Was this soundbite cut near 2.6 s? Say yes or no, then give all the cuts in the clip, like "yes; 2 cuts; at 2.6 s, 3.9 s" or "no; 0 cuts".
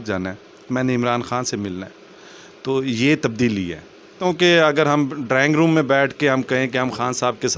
no; 1 cut; at 4.2 s